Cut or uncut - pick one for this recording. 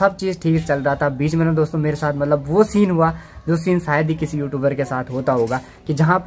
uncut